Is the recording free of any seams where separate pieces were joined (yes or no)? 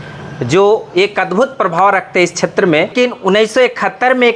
no